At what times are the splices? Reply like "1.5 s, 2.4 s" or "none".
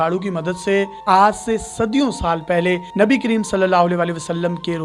1.0 s